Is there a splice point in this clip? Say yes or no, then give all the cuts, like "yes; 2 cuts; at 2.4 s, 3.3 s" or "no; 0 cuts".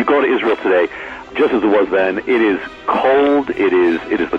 yes; 1 cut; at 1.3 s